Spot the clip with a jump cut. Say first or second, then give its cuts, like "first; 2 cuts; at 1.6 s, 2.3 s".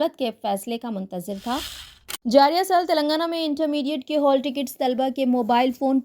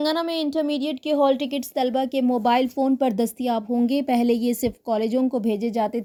first; 1 cut; at 1.8 s